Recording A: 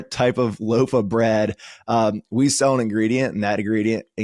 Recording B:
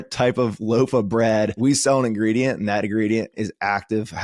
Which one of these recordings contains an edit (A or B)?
B